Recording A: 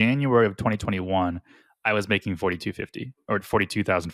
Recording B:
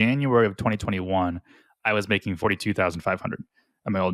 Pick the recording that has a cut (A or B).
B